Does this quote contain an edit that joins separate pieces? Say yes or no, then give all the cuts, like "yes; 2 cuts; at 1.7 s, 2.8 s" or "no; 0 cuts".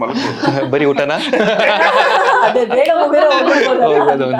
no; 0 cuts